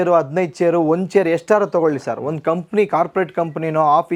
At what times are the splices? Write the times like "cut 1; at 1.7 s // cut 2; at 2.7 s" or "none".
none